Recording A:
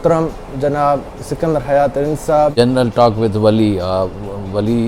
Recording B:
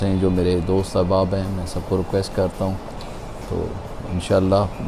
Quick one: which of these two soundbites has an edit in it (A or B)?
A